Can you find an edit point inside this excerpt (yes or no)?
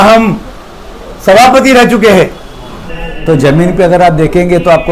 yes